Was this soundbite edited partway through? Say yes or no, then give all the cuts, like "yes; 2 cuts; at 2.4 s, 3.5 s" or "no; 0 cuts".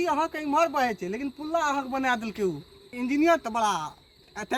no; 0 cuts